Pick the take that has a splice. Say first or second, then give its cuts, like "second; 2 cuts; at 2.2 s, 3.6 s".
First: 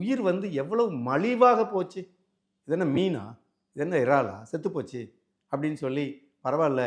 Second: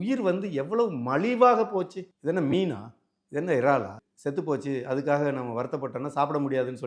second; 2 cuts; at 2.0 s, 4.0 s